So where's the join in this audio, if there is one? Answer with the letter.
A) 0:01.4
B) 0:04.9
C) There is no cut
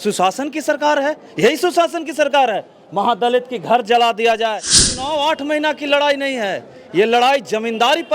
B